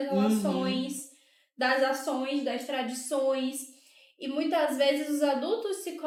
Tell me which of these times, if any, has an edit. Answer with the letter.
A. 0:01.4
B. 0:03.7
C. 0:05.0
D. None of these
D